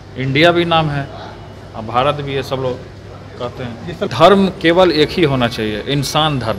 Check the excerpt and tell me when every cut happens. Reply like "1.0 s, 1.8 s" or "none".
4.1 s